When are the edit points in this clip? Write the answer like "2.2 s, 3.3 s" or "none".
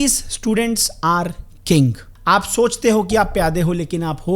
2.1 s